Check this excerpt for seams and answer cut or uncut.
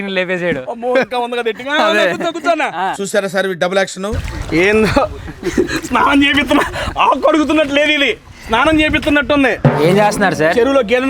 cut